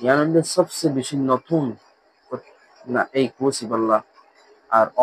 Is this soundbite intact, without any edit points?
yes; 0 cuts

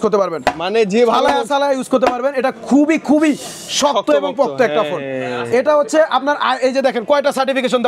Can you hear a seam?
no; 0 cuts

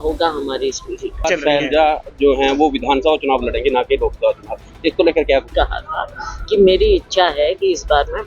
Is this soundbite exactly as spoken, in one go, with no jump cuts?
no; 2 cuts; at 1.2 s, 5.5 s

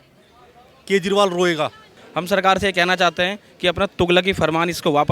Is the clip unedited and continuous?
no; 1 cut; at 2.0 s

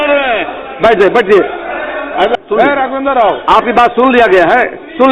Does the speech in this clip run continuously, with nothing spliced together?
no; 1 cut; at 2.3 s

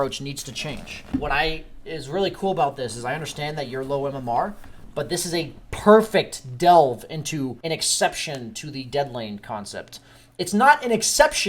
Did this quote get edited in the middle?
yes; 2 cuts; at 0.9 s, 7.6 s

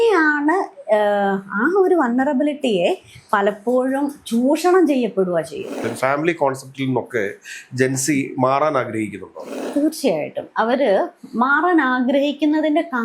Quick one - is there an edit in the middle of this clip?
yes; 1 cut; at 5.8 s

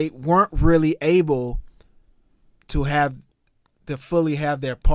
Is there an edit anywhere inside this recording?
no; 0 cuts

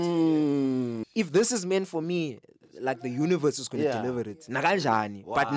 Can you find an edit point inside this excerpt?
yes; 1 cut; at 1.0 s

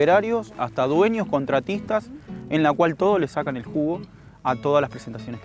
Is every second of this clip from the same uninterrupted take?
yes; 0 cuts

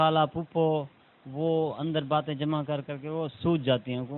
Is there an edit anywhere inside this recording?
no; 0 cuts

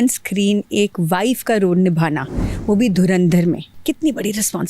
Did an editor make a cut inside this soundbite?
yes; 1 cut; at 3.7 s

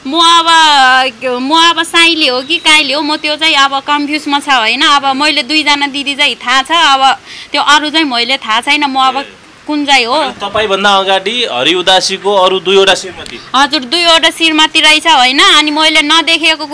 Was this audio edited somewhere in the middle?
no; 0 cuts

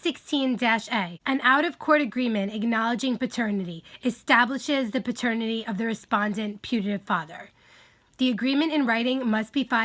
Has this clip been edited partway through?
yes; 1 cut; at 1.1 s

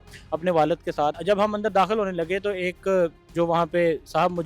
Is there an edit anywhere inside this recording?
yes; 1 cut; at 1.2 s

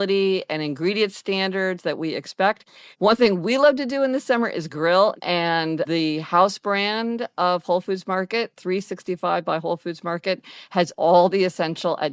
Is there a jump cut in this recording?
yes; 2 cuts; at 2.8 s, 5.2 s

